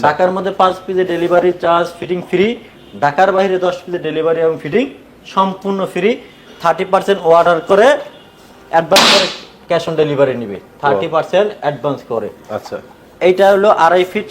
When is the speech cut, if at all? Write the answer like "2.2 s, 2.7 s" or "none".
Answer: none